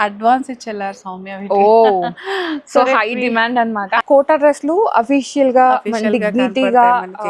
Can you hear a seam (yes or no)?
yes